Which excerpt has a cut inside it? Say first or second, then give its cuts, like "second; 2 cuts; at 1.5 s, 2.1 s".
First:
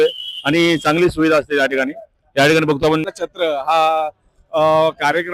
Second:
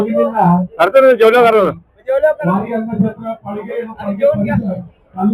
first; 1 cut; at 3.1 s